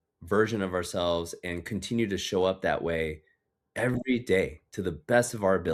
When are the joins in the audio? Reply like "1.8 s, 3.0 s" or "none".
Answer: none